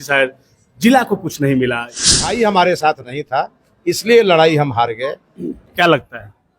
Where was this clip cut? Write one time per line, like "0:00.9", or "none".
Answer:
0:02.2
0:05.5